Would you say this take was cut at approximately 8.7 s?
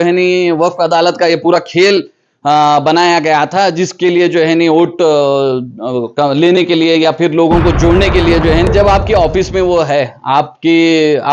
yes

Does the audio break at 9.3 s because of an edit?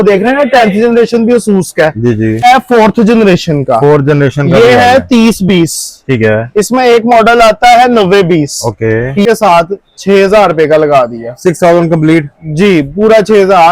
yes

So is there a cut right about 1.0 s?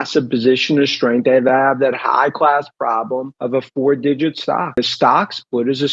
no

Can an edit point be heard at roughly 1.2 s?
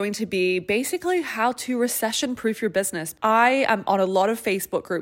no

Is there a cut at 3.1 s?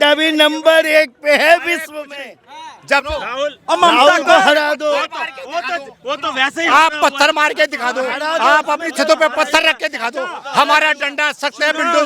yes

